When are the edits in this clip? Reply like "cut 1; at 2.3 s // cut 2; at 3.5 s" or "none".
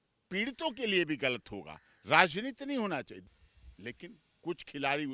cut 1; at 3.2 s